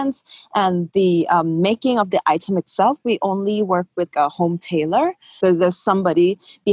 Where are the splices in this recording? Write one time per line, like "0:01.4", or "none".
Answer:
0:05.4